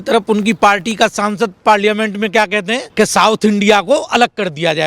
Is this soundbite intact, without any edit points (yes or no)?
no